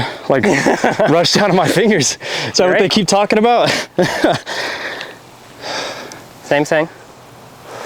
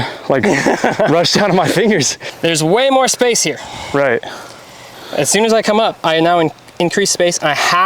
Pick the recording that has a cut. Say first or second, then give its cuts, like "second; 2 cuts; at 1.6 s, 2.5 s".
second; 1 cut; at 2.2 s